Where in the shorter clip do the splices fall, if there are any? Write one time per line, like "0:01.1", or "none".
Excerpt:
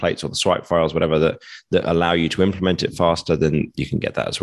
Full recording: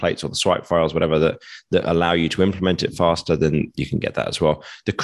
none